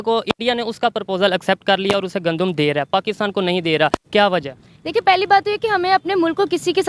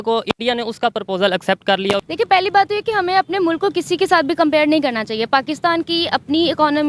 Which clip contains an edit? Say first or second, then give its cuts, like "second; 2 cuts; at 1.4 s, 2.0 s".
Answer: second; 1 cut; at 2.1 s